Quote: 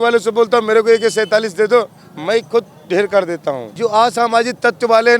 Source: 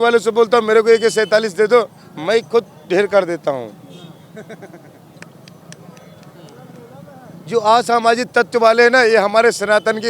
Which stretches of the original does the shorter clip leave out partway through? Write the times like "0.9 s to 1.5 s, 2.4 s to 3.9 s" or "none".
3.7 s to 7.4 s